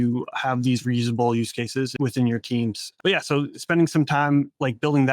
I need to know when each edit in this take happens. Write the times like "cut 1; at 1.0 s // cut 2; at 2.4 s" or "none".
cut 1; at 1.9 s // cut 2; at 2.9 s